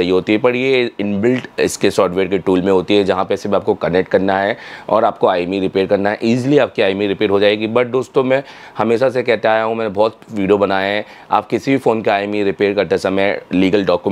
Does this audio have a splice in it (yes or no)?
no